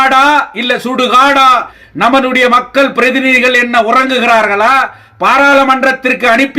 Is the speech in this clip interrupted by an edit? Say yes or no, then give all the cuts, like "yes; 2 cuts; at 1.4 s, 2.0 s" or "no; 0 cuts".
yes; 1 cut; at 1.8 s